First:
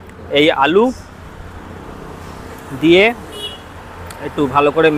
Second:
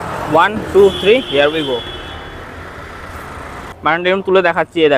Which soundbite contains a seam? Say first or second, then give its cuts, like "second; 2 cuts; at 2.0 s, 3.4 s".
second; 1 cut; at 3.8 s